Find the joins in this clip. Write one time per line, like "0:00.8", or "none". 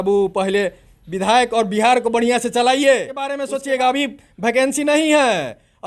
0:03.4